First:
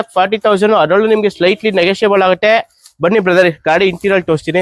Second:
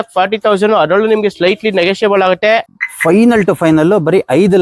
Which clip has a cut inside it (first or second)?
second